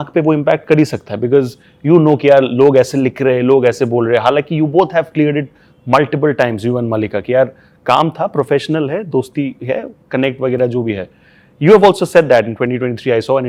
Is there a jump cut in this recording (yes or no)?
no